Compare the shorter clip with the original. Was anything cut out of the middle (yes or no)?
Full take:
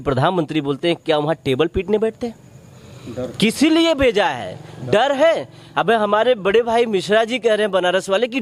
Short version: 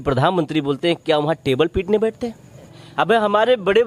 yes